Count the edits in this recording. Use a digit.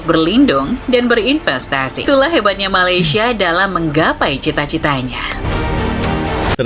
2